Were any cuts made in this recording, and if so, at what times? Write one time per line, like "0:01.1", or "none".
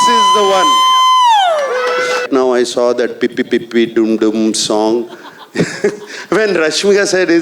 0:02.2